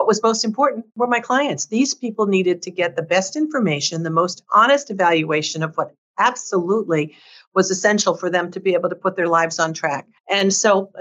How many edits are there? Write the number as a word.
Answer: two